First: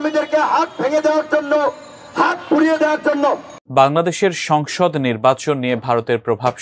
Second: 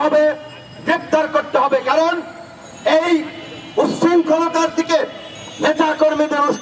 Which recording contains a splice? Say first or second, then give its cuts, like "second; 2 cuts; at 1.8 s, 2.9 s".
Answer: first; 1 cut; at 3.5 s